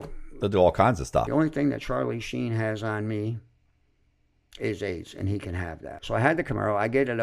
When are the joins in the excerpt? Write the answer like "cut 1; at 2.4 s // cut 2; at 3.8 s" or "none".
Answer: cut 1; at 1.3 s // cut 2; at 5.9 s